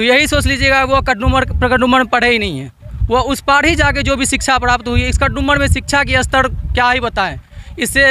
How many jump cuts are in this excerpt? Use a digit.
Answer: 0